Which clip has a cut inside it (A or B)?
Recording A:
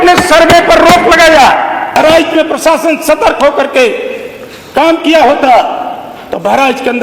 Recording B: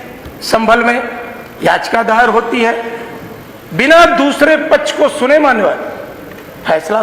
A